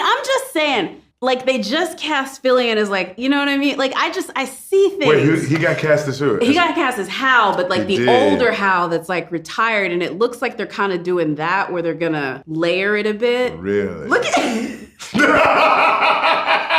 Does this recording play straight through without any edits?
no; 2 cuts; at 1.0 s, 12.4 s

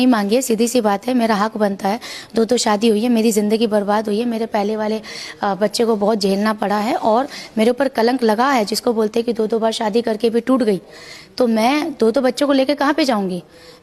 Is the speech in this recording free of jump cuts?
yes; 0 cuts

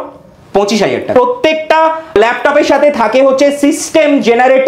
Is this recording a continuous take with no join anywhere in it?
no; 2 cuts; at 1.1 s, 2.1 s

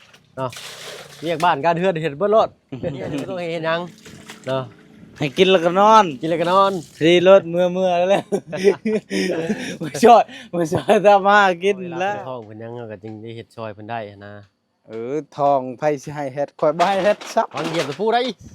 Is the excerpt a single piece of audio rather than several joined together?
no; 2 cuts; at 3.2 s, 12.2 s

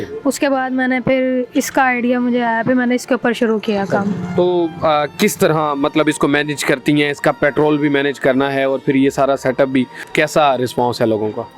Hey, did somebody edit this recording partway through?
no; 0 cuts

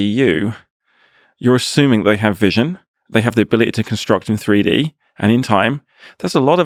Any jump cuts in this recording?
no; 0 cuts

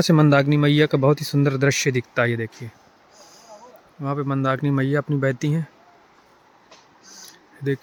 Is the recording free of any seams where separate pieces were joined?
yes; 0 cuts

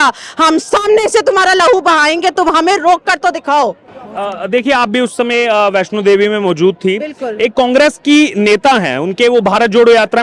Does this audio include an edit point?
no; 0 cuts

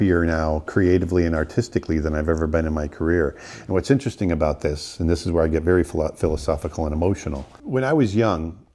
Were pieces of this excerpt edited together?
yes; 1 cut; at 7.5 s

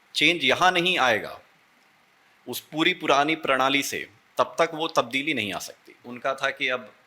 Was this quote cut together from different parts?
yes; 1 cut; at 6.1 s

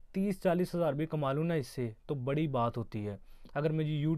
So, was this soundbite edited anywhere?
no; 0 cuts

